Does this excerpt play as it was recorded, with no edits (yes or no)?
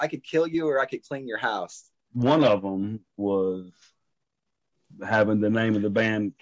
no